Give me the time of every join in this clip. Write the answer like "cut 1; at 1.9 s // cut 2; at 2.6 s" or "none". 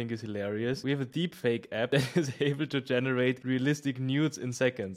cut 1; at 0.8 s // cut 2; at 1.9 s // cut 3; at 3.4 s